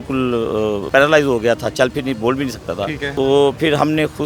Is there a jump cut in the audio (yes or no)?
yes